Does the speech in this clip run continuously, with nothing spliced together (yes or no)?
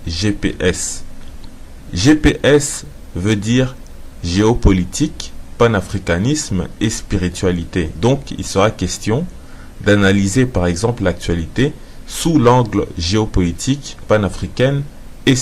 yes